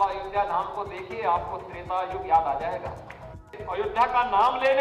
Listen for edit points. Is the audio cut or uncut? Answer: cut